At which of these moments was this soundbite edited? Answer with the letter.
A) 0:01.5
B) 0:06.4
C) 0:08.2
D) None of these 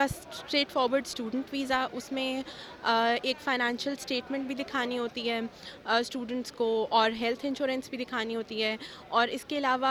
D